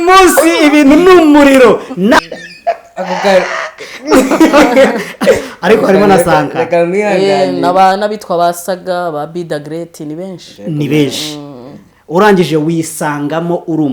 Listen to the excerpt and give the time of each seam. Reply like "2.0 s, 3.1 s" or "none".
2.2 s